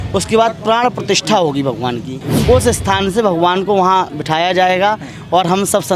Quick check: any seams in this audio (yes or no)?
yes